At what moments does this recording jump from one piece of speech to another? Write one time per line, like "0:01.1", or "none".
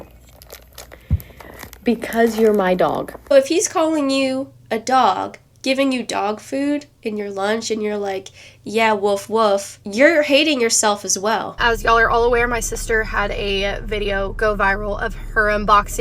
0:03.3
0:11.6